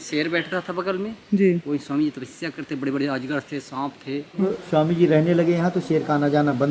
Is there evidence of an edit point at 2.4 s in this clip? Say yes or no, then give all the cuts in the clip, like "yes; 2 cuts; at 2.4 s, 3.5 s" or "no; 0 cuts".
no; 1 cut; at 4.3 s